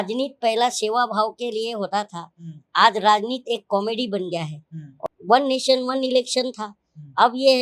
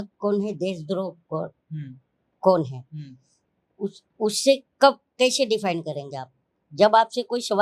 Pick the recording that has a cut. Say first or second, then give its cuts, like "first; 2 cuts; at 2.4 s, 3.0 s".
first; 1 cut; at 4.9 s